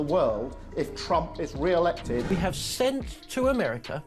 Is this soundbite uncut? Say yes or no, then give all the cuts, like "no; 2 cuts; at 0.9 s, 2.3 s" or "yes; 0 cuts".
no; 1 cut; at 2.3 s